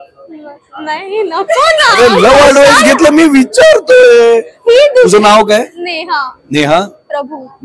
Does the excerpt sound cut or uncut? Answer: uncut